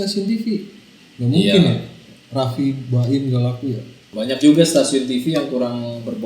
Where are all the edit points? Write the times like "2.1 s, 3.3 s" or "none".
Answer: 4.0 s